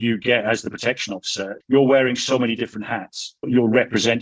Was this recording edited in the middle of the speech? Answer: yes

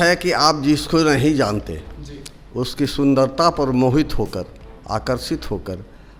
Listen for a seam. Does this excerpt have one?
no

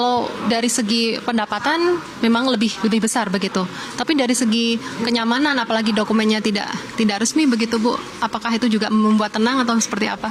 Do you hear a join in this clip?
no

